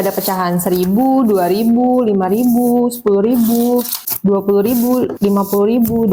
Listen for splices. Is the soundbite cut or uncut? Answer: cut